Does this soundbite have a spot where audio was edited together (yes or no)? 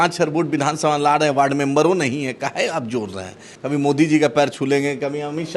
yes